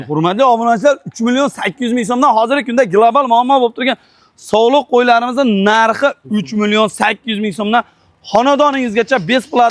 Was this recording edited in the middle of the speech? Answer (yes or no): no